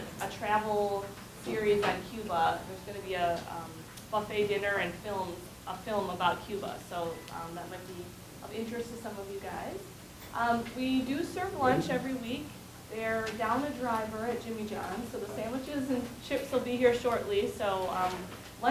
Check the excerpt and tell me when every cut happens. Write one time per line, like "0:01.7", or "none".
0:04.6